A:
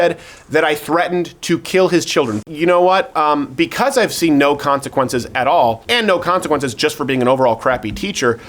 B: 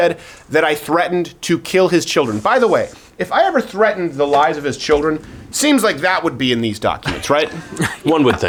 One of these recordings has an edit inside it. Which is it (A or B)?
A